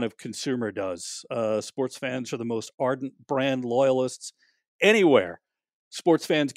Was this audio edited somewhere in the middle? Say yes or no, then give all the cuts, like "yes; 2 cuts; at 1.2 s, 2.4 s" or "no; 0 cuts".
no; 0 cuts